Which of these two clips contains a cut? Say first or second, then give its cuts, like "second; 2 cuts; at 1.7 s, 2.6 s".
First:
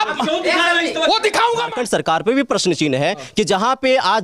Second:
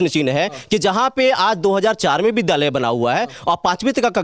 first; 1 cut; at 1.7 s